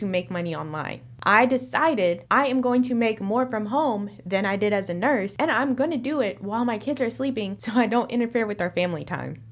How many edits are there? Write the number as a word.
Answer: zero